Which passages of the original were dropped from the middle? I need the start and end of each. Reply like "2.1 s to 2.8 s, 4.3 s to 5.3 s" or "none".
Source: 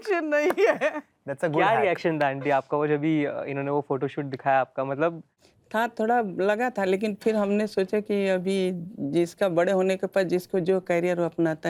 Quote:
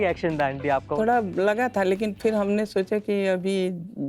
2.7 s to 5.9 s